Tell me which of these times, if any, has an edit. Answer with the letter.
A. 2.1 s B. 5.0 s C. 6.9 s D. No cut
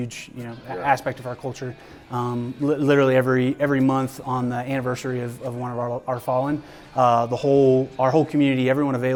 D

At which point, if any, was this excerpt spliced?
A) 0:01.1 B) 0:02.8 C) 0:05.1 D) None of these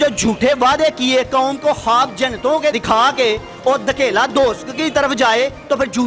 B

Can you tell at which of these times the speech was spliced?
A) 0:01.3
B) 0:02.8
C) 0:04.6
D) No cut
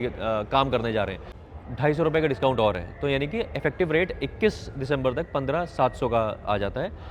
A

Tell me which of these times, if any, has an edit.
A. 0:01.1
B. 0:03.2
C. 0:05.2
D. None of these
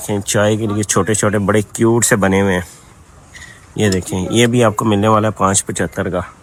D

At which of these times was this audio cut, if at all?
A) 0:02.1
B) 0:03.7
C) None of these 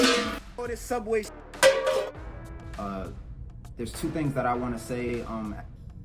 A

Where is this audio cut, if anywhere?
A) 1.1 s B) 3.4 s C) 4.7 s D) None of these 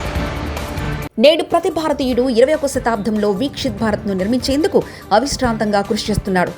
A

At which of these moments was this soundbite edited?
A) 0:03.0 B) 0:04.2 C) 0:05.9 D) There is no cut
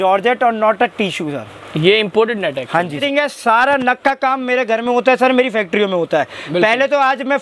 A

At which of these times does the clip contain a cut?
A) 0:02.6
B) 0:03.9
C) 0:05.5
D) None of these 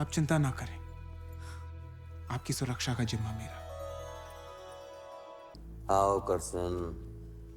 C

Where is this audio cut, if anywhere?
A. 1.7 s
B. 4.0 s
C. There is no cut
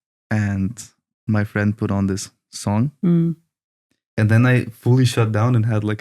B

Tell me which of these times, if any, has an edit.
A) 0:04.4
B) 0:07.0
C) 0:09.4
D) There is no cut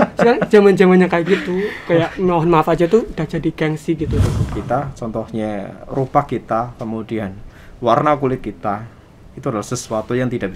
A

